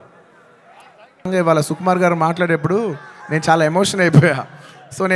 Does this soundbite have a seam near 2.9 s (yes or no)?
no